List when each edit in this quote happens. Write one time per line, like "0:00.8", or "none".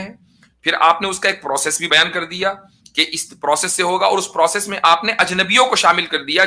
0:01.9